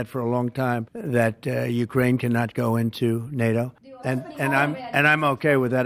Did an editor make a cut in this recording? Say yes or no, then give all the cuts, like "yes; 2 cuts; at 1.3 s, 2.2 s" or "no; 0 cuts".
no; 0 cuts